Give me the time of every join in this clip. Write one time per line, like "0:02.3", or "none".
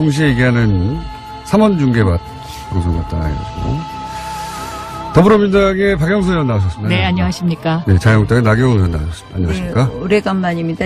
none